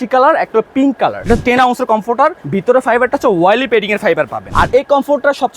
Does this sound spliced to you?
yes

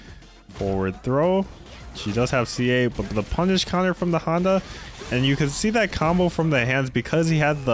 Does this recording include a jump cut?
no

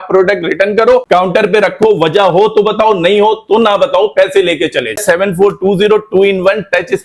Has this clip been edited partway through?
yes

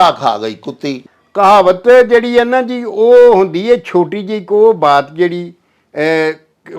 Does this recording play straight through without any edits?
no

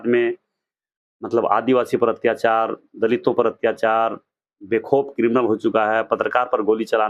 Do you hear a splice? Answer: no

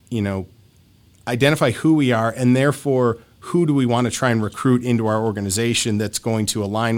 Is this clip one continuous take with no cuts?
yes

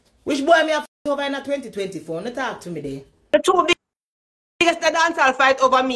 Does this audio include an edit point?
yes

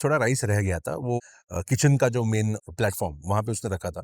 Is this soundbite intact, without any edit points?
no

